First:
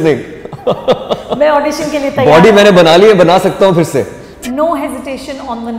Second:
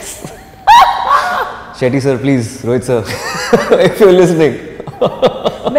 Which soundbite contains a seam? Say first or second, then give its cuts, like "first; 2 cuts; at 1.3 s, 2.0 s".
first; 1 cut; at 4.4 s